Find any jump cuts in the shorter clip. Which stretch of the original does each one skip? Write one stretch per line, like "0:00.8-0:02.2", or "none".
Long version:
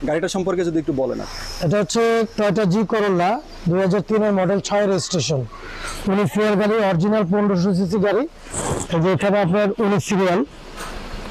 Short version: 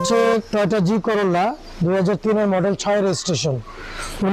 none